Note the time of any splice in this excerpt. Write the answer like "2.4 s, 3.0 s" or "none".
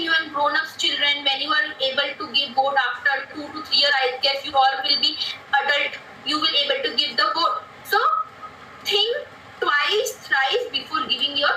none